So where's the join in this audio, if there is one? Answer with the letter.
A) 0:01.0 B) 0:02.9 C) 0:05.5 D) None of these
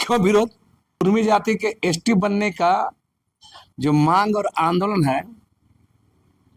A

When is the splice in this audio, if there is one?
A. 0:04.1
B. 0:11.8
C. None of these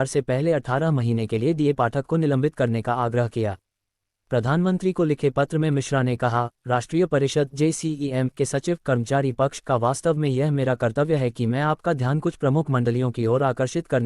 A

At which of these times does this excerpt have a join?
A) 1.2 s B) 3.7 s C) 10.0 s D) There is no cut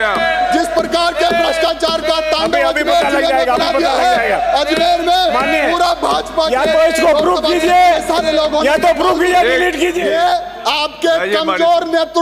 C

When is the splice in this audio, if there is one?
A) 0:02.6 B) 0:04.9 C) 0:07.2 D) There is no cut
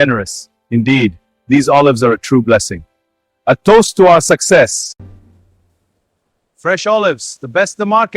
B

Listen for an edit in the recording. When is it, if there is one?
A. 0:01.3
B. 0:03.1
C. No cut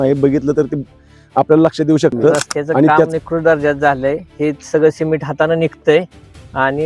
B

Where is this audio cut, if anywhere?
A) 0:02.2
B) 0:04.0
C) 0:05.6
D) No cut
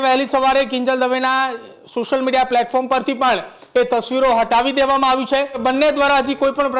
C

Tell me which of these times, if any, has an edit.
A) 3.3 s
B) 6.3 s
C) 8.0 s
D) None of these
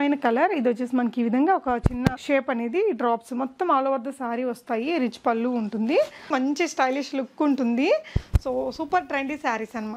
B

